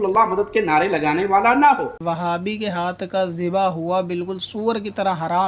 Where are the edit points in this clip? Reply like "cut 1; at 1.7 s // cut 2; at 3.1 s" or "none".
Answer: cut 1; at 1.9 s